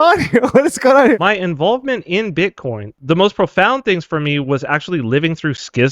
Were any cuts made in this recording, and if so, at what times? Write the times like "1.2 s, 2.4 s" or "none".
1.2 s, 2.9 s